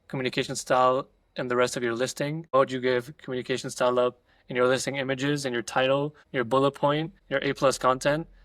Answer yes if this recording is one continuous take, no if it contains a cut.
no